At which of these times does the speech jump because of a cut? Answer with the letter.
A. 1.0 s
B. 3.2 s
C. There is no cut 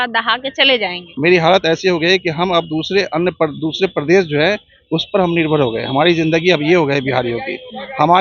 A